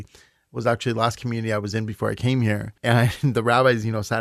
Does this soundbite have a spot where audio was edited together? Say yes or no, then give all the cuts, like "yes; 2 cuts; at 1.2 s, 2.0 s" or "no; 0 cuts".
yes; 1 cut; at 2.7 s